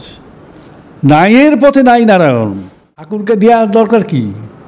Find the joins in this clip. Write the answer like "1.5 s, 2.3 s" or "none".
3.1 s